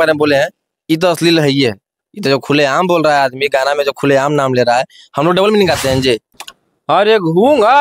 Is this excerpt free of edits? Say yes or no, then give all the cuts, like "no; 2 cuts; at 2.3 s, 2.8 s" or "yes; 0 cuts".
no; 1 cut; at 6.3 s